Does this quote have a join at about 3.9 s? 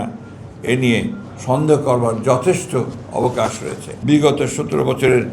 yes; 1 cut; at 3.9 s

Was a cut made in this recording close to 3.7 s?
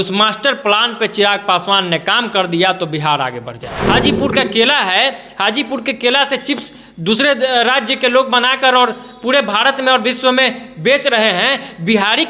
yes; 1 cut; at 3.7 s

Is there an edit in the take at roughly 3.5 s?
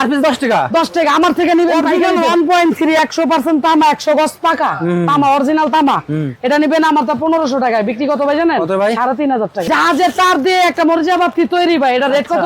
no; 2 cuts; at 1.8 s, 9.7 s

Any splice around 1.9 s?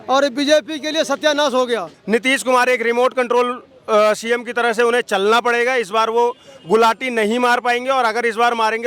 yes; 1 cut; at 1.9 s

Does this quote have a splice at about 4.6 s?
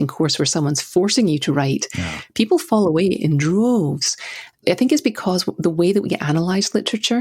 yes; 1 cut; at 4.6 s

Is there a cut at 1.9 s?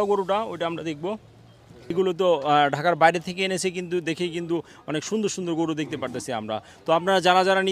yes; 1 cut; at 1.9 s

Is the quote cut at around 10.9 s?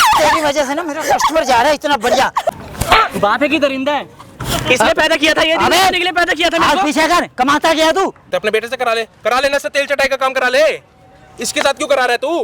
no; 3 cuts; at 2.5 s, 4.4 s, 8.2 s

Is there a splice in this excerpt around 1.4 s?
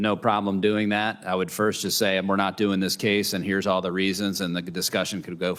no; 0 cuts

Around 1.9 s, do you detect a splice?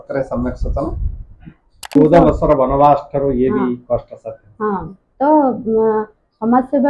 yes; 1 cut; at 1.9 s

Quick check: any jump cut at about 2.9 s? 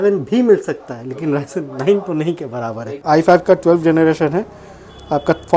yes; 1 cut; at 2.9 s

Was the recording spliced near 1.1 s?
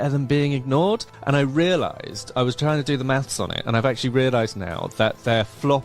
yes; 1 cut; at 1.1 s

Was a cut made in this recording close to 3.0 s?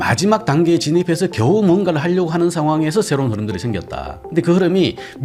no; 0 cuts

